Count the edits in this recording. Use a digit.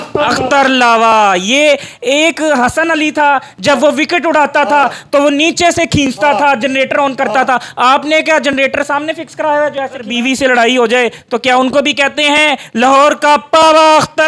1